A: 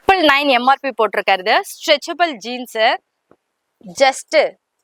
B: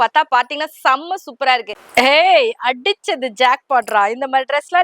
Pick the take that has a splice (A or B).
B